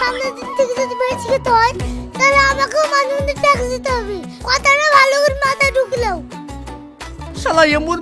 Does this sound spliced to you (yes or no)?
no